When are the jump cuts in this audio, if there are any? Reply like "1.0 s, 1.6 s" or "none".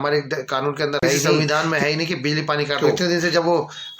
1.2 s, 2.8 s

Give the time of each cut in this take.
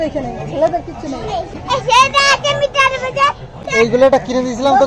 1.5 s, 3.9 s

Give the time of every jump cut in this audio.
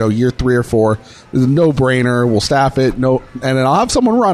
none

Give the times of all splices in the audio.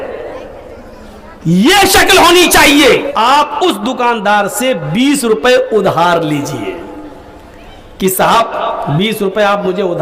3.1 s

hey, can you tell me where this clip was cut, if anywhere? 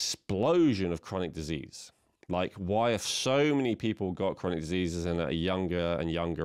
none

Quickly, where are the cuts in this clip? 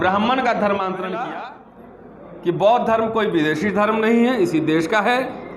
1.3 s

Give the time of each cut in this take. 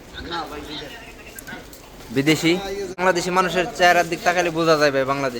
3.0 s

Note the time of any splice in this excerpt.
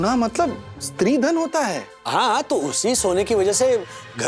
none

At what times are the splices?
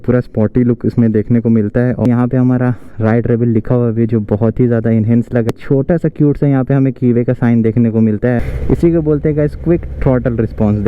2.1 s, 5.5 s, 8.5 s

